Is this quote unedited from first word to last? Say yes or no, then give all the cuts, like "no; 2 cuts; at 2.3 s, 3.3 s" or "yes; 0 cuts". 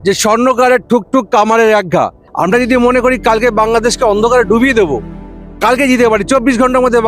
no; 1 cut; at 2.2 s